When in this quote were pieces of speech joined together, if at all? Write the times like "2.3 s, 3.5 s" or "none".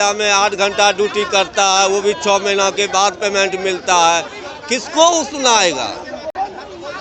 none